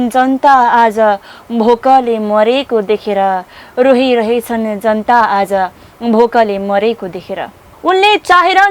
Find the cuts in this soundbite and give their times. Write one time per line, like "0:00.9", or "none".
0:07.7